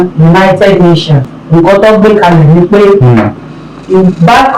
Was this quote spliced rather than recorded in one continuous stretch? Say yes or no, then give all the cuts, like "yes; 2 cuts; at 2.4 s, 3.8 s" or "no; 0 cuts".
yes; 1 cut; at 1.3 s